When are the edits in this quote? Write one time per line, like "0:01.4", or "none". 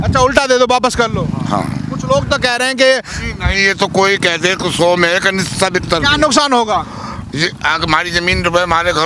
none